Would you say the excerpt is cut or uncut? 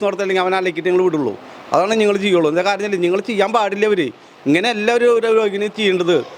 uncut